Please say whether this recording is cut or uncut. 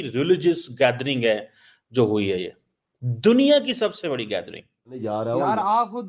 cut